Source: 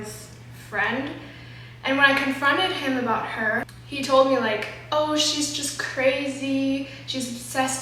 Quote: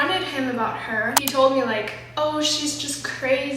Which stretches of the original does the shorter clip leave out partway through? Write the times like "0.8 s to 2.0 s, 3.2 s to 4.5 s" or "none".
3.7 s to 3.9 s